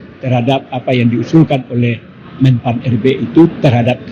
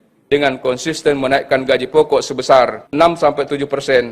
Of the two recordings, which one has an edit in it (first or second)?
second